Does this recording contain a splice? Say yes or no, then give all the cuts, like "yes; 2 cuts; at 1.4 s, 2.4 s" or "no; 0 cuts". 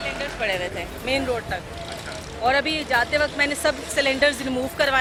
no; 0 cuts